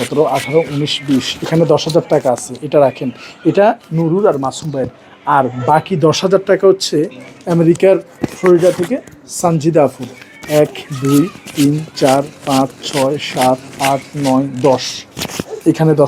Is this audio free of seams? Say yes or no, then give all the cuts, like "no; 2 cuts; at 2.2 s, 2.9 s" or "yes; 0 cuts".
yes; 0 cuts